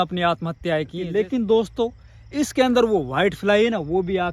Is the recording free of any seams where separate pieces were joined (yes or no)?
no